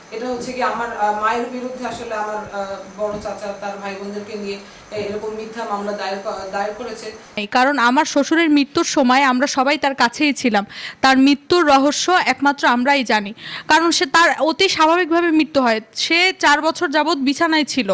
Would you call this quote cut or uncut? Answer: cut